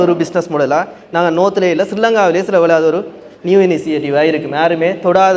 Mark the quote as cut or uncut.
uncut